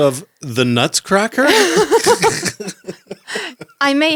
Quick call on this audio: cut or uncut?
uncut